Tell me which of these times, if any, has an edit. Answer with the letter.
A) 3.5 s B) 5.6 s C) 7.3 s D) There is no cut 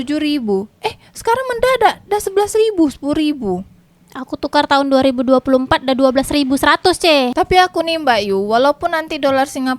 C